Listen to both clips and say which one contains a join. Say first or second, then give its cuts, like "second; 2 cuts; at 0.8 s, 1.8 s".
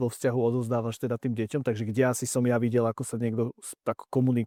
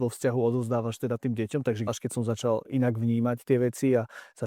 second; 1 cut; at 1.9 s